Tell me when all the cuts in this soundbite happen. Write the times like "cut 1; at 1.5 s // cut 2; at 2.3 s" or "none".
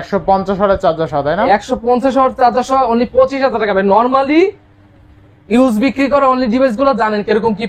none